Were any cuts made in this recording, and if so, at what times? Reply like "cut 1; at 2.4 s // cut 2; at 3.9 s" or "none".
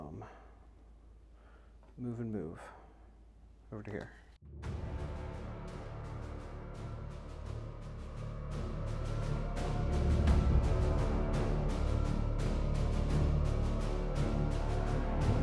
cut 1; at 4.3 s